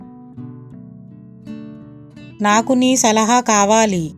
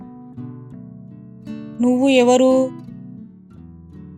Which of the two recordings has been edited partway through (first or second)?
first